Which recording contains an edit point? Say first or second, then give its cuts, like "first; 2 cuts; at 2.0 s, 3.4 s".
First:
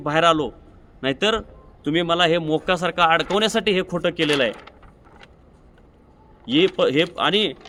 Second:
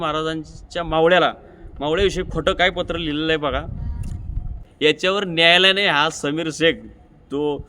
second; 1 cut; at 4.6 s